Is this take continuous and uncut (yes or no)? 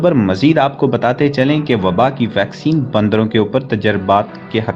yes